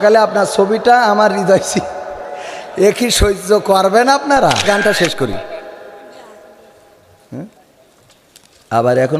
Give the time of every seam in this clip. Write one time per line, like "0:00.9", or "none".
0:04.8